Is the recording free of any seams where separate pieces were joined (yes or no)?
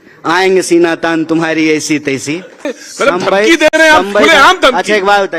no